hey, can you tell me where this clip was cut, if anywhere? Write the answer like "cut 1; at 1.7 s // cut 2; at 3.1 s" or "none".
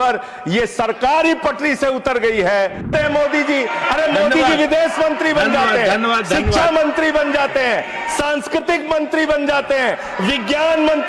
cut 1; at 2.9 s